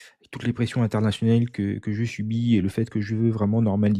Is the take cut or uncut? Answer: uncut